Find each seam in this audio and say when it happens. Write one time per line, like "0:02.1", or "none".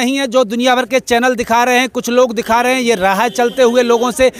none